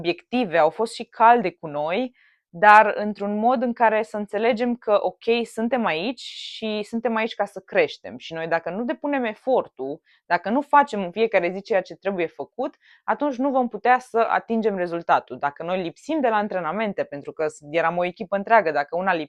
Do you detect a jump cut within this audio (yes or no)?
no